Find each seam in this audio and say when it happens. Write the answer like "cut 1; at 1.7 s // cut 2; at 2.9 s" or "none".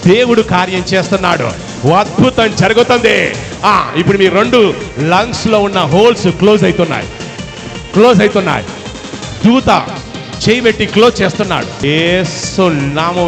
cut 1; at 11.8 s